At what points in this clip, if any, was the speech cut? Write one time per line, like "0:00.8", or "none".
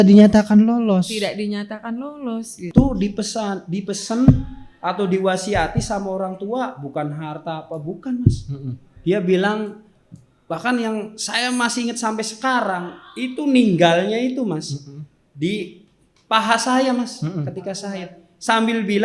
0:02.7